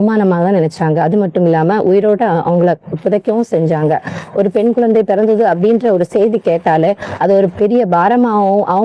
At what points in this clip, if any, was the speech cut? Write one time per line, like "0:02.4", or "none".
none